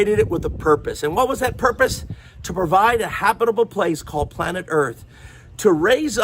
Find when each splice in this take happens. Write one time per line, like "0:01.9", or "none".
0:00.9
0:05.0